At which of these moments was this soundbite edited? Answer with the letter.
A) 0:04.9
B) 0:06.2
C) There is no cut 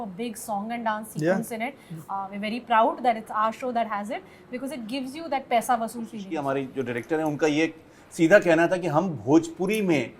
B